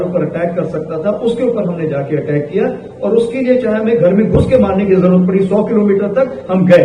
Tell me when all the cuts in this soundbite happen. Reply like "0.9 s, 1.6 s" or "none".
none